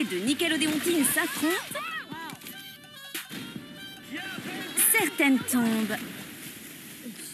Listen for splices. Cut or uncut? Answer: uncut